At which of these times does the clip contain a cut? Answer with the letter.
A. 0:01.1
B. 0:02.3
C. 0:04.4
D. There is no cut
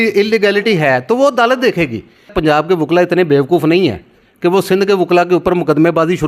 B